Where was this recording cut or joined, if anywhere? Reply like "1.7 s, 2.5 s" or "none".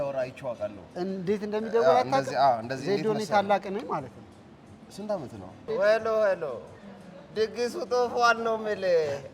5.7 s